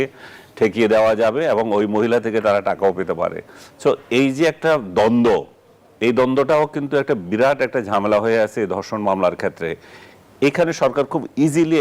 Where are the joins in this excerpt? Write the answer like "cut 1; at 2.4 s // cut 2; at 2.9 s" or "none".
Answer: none